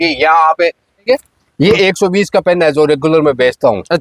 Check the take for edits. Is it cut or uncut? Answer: cut